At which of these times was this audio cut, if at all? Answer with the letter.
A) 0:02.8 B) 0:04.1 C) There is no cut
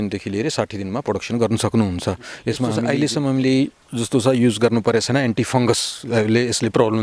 A